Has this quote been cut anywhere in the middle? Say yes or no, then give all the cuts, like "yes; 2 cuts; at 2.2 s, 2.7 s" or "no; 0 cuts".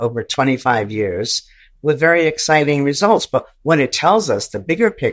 no; 0 cuts